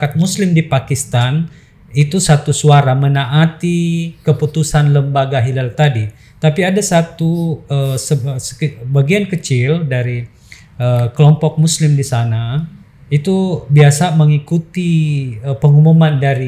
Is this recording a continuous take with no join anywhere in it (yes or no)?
yes